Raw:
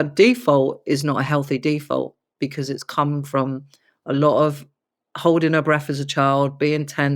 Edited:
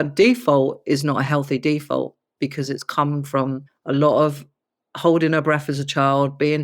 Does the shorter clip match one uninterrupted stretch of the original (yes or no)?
no